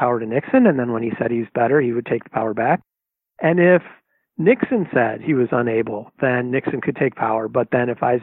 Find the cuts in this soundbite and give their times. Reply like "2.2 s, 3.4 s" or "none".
none